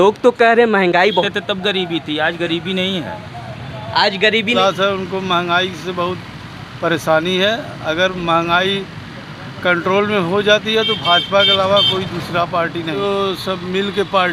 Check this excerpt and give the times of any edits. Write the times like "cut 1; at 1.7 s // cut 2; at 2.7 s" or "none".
cut 1; at 1.3 s // cut 2; at 4.6 s // cut 3; at 13.0 s